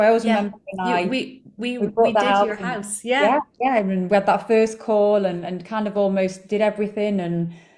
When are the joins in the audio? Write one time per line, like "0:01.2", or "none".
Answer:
none